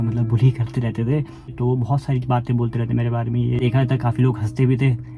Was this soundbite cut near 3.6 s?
yes; 2 cuts; at 1.5 s, 3.6 s

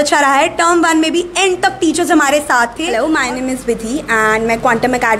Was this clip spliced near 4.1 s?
no; 1 cut; at 2.8 s

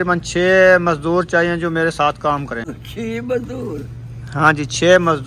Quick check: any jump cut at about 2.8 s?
yes; 1 cut; at 2.8 s

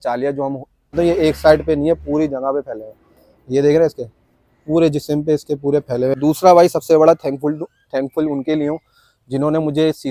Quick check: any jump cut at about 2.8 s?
no; 2 cuts; at 1.0 s, 6.1 s

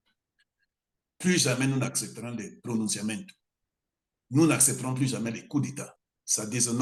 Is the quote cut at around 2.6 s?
no; 0 cuts

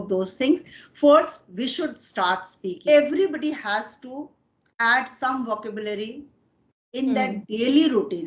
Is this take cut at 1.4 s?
no; 1 cut; at 2.8 s

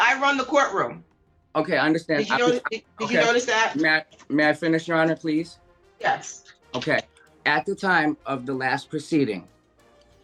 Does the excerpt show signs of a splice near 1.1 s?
no; 0 cuts

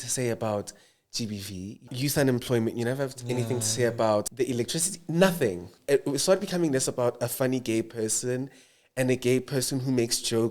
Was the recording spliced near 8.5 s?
no; 3 cuts; at 1.9 s, 4.3 s, 5.7 s

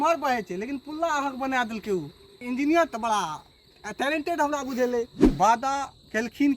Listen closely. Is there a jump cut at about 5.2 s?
yes; 1 cut; at 5.2 s

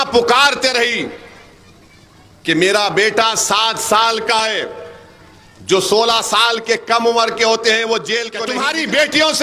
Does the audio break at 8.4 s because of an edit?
yes; 1 cut; at 8.4 s

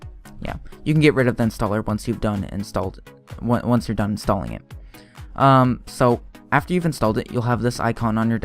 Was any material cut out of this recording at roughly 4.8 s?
no; 1 cut; at 7.2 s

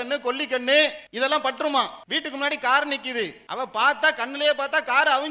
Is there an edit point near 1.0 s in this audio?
yes; 3 cuts; at 1.0 s, 2.0 s, 3.4 s

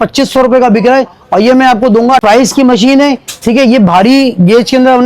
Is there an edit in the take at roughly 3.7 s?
no; 1 cut; at 2.2 s

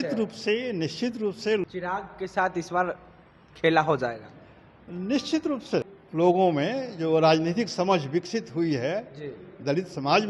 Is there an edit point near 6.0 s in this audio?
yes; 2 cuts; at 1.6 s, 6.0 s

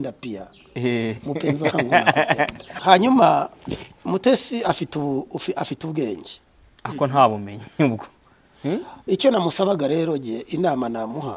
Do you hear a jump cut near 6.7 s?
no; 1 cut; at 2.6 s

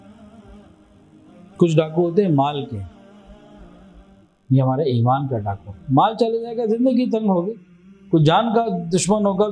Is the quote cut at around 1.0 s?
yes; 1 cut; at 1.0 s

